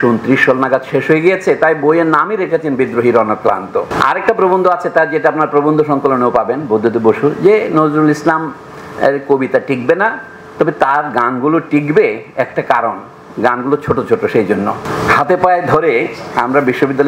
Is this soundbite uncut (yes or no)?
no